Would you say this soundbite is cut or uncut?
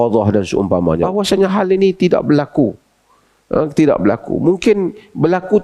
cut